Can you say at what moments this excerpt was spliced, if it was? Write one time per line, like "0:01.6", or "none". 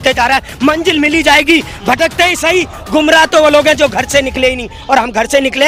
none